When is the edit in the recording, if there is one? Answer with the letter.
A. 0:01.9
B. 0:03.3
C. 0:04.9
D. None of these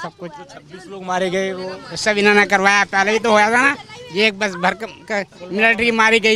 D